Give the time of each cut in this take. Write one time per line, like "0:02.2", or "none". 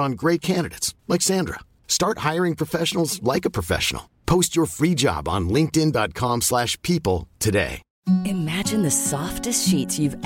0:07.9